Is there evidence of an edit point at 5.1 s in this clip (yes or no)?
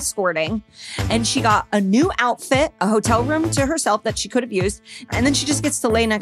yes